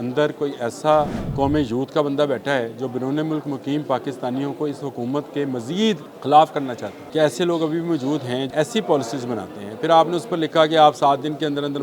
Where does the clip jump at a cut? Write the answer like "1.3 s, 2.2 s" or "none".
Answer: 1.2 s, 6.1 s, 6.9 s, 8.5 s